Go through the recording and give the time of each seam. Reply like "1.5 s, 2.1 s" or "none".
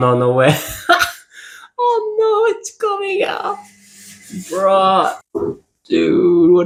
none